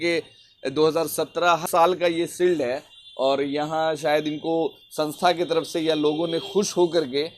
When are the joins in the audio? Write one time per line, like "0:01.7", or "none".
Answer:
0:01.6